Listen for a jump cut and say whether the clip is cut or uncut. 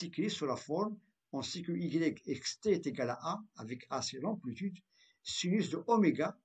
uncut